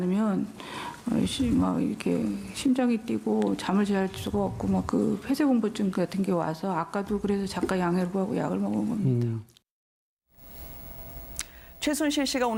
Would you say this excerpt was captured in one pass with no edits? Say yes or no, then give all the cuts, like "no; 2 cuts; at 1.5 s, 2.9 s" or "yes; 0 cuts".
yes; 0 cuts